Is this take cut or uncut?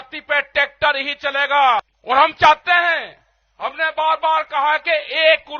cut